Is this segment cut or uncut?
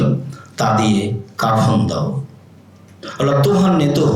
uncut